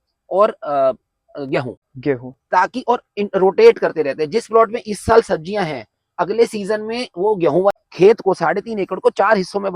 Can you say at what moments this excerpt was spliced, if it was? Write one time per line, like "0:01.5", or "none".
0:07.7